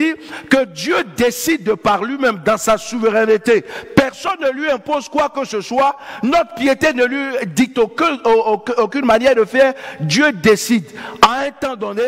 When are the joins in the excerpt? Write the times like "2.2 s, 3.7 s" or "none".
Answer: none

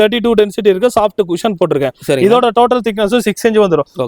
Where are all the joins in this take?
none

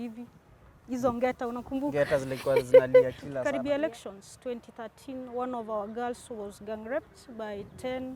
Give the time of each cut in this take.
3.4 s

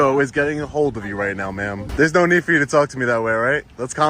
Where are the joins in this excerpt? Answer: 1.8 s

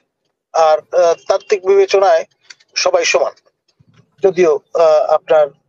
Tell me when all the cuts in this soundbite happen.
none

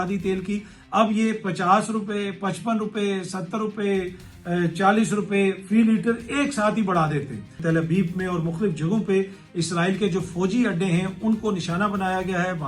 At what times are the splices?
7.6 s

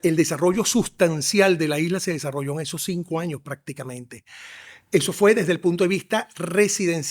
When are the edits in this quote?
none

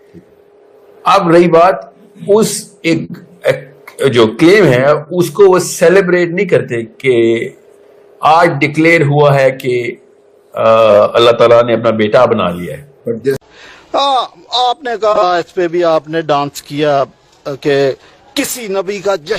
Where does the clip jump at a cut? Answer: 13.4 s

